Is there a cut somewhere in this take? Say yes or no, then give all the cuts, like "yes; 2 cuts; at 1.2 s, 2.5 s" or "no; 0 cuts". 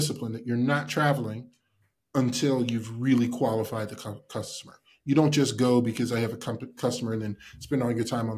no; 0 cuts